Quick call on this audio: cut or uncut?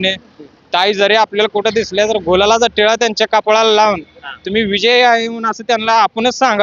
uncut